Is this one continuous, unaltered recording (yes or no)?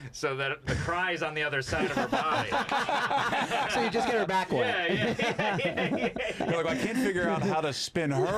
yes